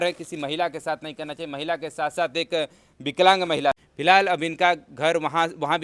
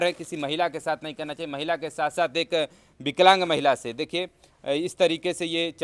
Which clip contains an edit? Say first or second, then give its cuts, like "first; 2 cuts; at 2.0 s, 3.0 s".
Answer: first; 1 cut; at 3.9 s